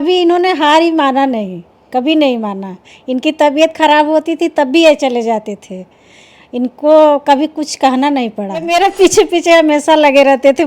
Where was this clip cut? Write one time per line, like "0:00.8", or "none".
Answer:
0:08.5